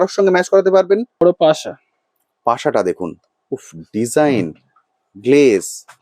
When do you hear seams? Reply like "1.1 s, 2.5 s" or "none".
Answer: 1.2 s

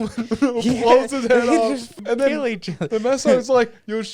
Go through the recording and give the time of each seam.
1.9 s

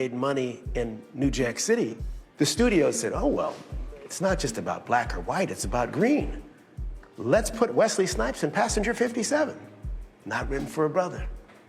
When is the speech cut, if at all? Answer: 7.5 s

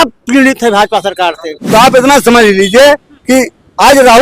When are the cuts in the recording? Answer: 1.6 s

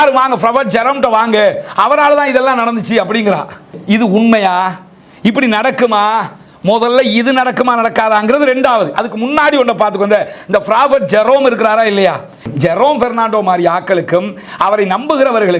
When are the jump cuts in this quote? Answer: 3.7 s, 12.5 s

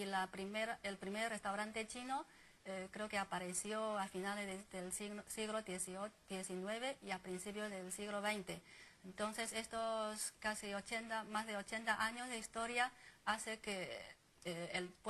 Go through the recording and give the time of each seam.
3.4 s

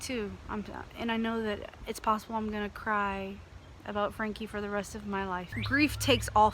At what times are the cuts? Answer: 5.5 s

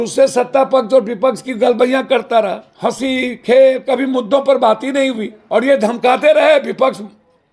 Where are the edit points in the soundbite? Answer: 2.6 s, 5.3 s

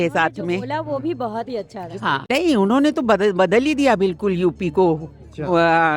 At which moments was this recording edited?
2.3 s

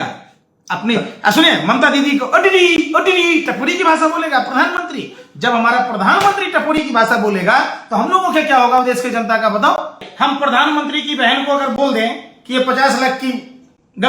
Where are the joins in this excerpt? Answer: 10.1 s

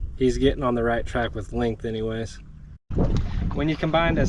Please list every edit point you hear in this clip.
2.9 s

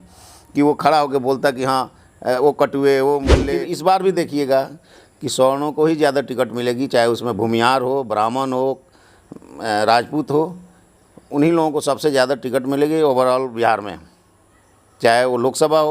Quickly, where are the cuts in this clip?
3.5 s

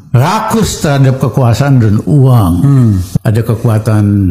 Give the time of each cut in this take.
3.1 s

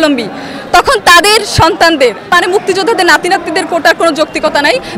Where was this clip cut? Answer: 2.2 s

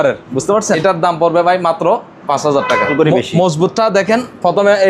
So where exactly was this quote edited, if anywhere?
0.8 s, 2.9 s

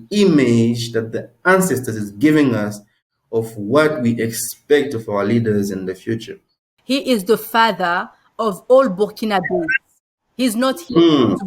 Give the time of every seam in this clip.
6.7 s

